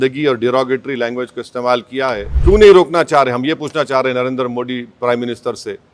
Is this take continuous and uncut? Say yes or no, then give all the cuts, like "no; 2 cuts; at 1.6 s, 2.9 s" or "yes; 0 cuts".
no; 1 cut; at 2.3 s